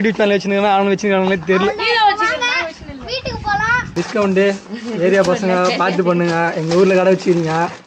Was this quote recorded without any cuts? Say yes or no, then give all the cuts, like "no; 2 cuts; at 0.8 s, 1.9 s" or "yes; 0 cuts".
no; 1 cut; at 3.9 s